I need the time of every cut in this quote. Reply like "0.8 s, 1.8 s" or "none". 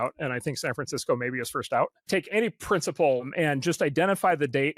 2.0 s, 3.2 s